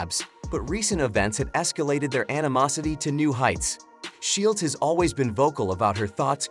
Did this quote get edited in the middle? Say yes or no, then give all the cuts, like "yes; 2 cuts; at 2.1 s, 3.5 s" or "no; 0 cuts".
yes; 1 cut; at 3.7 s